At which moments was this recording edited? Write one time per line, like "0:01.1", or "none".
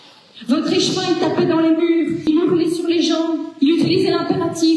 0:02.3